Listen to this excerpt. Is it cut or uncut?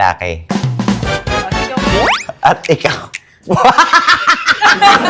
uncut